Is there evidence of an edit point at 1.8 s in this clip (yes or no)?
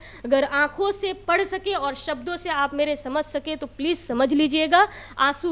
no